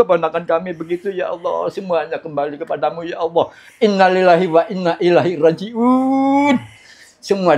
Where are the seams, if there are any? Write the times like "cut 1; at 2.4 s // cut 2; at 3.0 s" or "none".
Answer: none